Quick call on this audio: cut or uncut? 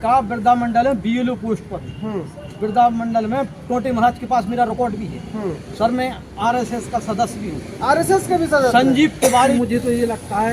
cut